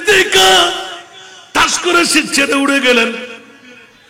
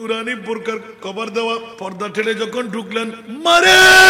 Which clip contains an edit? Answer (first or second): second